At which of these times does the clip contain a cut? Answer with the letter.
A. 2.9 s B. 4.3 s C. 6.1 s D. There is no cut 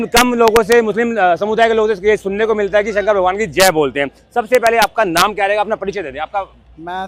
D